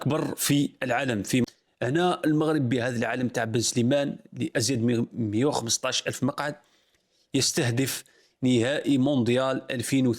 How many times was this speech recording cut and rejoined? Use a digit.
1